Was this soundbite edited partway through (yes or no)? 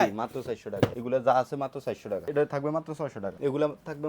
yes